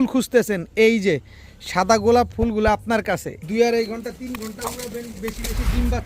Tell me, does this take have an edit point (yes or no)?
yes